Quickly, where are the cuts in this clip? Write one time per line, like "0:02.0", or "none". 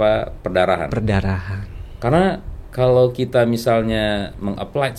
none